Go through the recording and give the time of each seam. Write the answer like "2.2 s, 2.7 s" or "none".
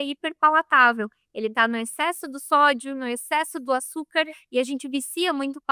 none